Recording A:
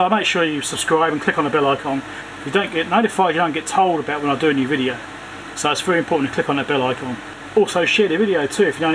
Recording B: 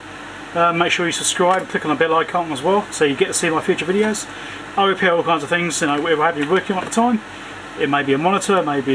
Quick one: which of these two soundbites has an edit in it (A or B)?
A